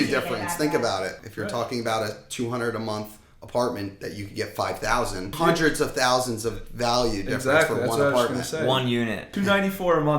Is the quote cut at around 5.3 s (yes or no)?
yes